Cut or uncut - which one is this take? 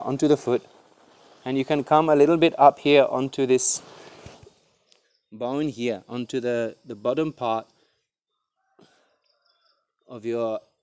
uncut